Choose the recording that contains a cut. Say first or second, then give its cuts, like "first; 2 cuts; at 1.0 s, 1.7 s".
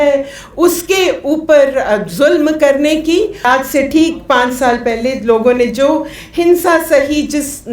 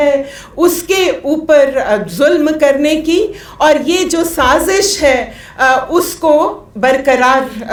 first; 1 cut; at 3.4 s